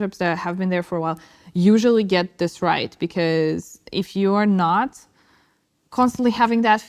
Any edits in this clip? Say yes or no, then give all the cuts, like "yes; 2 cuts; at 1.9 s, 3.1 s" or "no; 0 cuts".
no; 0 cuts